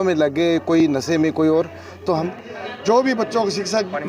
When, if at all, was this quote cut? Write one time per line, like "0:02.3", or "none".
0:02.2